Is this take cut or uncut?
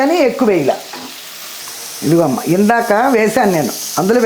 cut